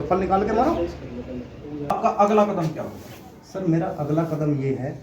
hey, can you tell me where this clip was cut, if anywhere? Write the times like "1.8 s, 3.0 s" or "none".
2.0 s